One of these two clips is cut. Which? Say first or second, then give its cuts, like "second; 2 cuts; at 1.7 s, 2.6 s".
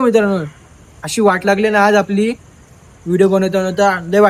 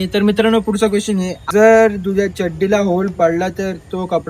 second; 1 cut; at 1.4 s